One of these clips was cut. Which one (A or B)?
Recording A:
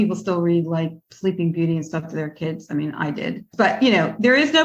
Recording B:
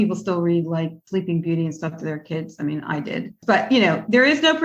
B